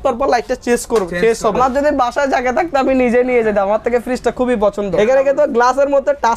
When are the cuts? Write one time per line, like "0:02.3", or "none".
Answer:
0:01.6
0:04.9